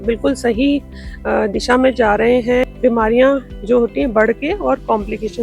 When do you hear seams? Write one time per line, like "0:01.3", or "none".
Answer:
0:02.6